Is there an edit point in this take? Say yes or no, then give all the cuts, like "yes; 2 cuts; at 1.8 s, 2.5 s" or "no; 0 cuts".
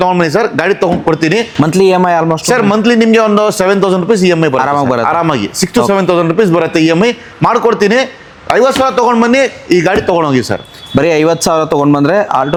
no; 0 cuts